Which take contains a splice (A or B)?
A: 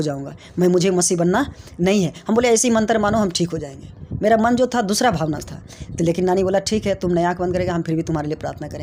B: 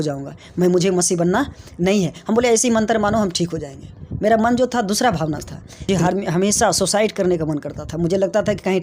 B